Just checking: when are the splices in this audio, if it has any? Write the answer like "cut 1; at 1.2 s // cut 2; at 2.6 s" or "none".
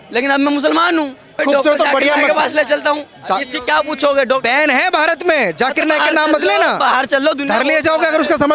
cut 1; at 1.4 s